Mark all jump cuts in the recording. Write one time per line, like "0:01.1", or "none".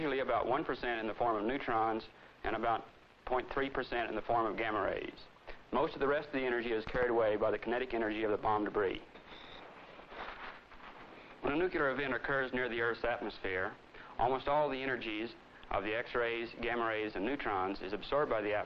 0:06.9